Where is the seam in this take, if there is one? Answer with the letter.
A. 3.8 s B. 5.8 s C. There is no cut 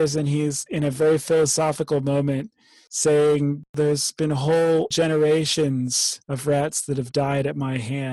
A